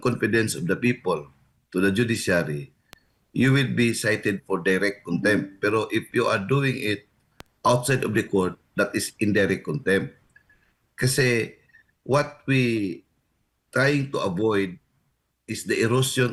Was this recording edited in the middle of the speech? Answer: no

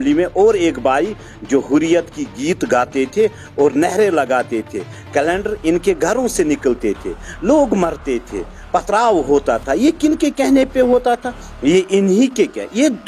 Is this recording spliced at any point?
no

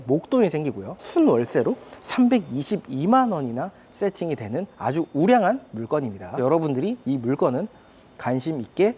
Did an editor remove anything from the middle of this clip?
yes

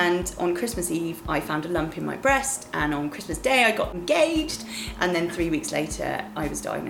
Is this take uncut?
no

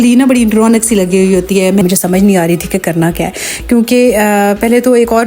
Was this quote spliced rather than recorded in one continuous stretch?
yes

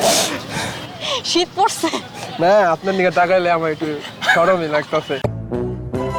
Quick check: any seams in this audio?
no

